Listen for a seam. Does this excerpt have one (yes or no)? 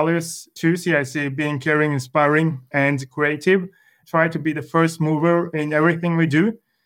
yes